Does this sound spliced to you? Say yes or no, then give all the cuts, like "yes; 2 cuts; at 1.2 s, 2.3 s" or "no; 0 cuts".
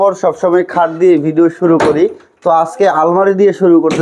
no; 0 cuts